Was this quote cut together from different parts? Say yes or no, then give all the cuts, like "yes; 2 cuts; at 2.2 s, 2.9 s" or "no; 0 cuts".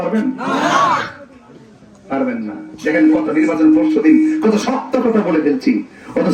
no; 0 cuts